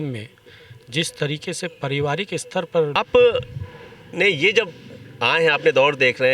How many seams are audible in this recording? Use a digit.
1